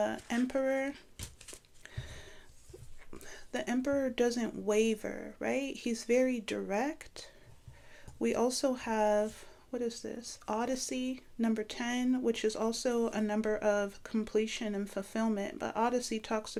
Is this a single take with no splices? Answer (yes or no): yes